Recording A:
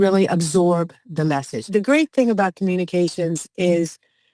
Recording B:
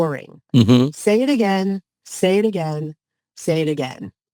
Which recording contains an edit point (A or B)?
A